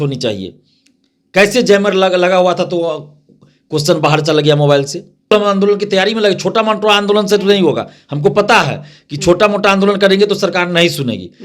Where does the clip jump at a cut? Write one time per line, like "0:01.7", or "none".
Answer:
0:05.3